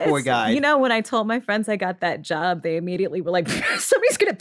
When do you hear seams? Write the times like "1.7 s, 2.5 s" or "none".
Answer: none